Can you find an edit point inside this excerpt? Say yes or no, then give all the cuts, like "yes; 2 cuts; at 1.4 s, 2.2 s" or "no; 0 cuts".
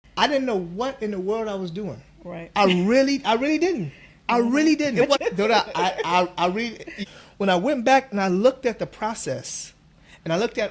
yes; 2 cuts; at 4.9 s, 7.0 s